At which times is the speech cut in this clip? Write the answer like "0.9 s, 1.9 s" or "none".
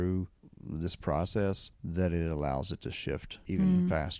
1.7 s, 3.3 s